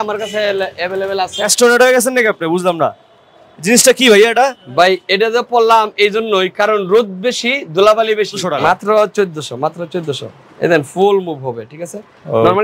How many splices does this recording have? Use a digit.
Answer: 2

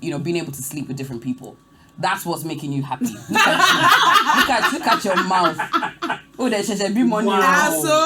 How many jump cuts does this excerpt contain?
0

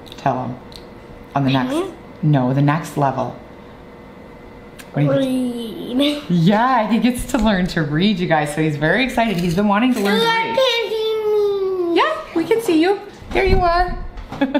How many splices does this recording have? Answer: 0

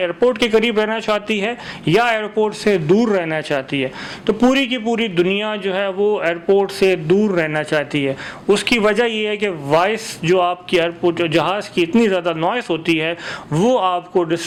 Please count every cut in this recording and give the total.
0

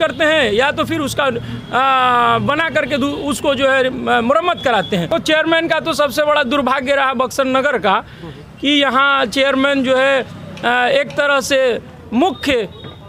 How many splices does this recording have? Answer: 1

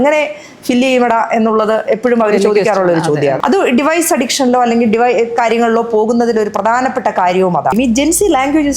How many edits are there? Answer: 2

